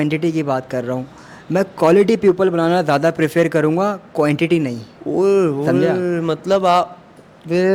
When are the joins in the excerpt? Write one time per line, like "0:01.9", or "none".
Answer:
none